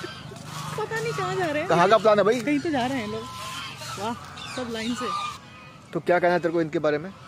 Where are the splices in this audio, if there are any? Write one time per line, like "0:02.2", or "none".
0:05.4